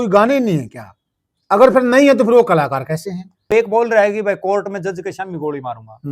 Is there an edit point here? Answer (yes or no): yes